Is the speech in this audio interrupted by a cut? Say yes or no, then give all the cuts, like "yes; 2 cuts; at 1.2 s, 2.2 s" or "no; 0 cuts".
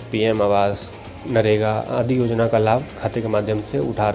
no; 0 cuts